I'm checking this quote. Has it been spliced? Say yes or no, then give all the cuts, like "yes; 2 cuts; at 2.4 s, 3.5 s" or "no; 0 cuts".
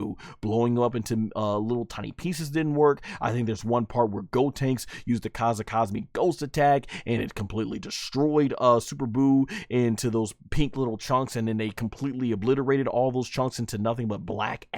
no; 0 cuts